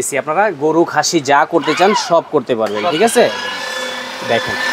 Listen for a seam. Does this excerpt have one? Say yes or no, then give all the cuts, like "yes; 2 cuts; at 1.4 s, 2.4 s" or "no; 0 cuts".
no; 0 cuts